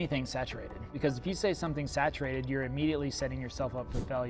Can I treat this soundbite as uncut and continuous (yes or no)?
no